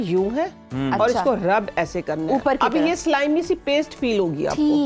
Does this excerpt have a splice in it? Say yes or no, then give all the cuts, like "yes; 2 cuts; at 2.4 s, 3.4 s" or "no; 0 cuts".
no; 0 cuts